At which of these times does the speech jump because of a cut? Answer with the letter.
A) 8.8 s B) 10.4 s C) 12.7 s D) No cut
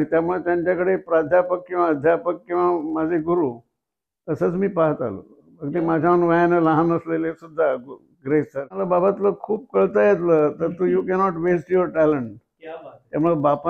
A